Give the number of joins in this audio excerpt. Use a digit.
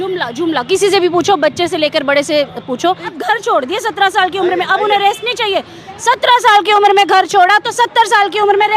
1